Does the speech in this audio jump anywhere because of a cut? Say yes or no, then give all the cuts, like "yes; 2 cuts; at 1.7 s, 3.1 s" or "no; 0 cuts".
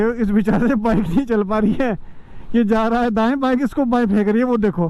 no; 0 cuts